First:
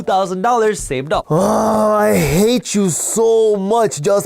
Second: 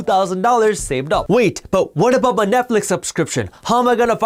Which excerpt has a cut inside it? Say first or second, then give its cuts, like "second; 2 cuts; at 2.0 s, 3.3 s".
first; 1 cut; at 1.2 s